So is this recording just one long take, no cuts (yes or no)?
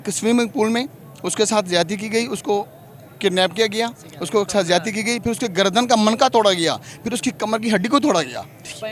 yes